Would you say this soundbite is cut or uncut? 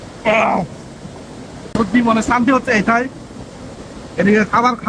cut